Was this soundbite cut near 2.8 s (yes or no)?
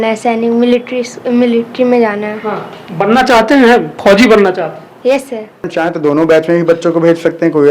no